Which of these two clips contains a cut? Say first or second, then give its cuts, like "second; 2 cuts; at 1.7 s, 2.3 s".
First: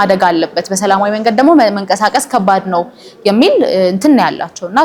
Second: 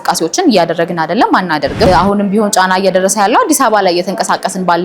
second; 1 cut; at 1.9 s